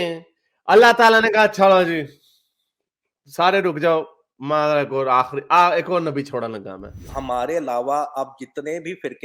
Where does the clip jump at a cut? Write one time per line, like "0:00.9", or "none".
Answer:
0:07.1